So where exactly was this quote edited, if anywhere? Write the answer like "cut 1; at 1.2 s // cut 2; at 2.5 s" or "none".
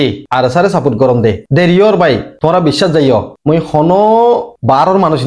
none